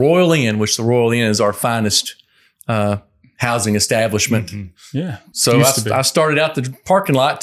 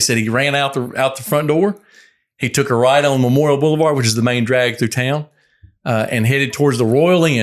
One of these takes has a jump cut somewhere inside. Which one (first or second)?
first